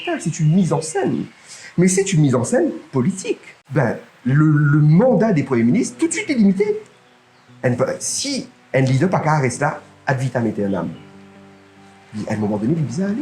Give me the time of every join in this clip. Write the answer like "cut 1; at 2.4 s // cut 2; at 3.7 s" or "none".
cut 1; at 3.5 s